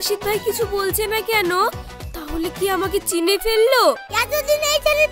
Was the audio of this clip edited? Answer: yes; 1 cut; at 4.1 s

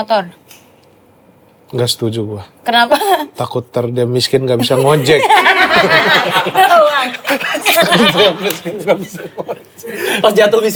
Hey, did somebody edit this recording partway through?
no; 0 cuts

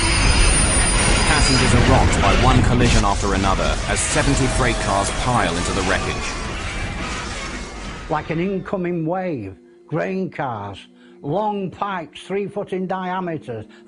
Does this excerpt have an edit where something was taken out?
no; 0 cuts

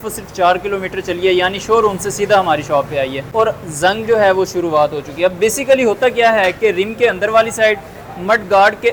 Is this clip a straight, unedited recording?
yes; 0 cuts

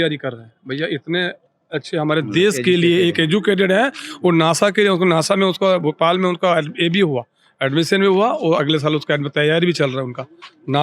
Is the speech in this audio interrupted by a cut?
no; 0 cuts

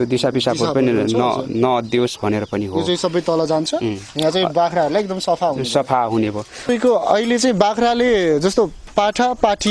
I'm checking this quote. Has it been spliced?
yes; 1 cut; at 6.7 s

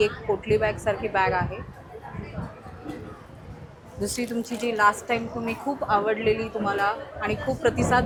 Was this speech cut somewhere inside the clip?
no; 0 cuts

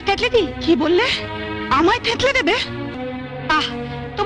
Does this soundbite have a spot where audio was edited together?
no; 0 cuts

